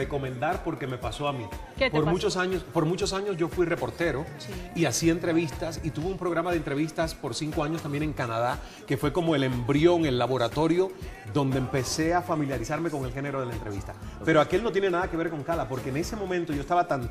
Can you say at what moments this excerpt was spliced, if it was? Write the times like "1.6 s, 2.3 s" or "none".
5.2 s